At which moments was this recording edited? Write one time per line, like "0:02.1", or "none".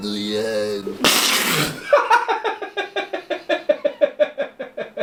none